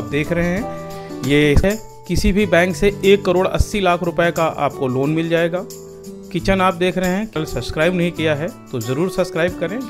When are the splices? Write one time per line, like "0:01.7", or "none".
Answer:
0:01.6
0:07.3

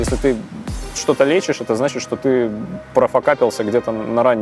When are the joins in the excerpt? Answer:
none

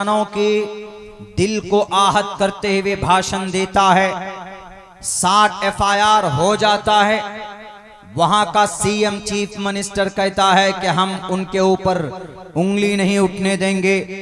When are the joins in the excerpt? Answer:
none

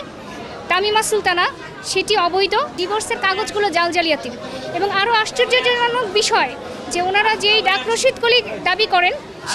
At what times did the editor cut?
0:02.8

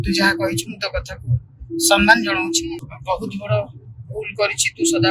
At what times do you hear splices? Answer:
0:02.9

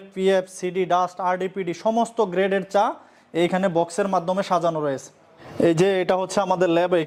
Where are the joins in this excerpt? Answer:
none

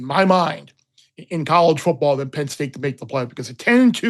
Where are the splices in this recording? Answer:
none

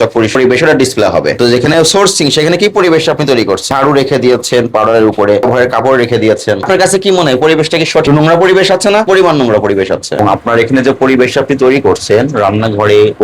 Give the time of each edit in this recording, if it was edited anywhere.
0:10.2

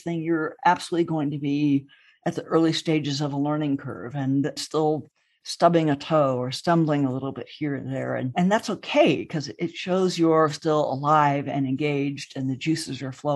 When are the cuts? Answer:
0:04.6

